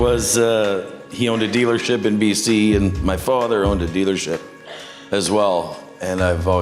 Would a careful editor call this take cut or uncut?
uncut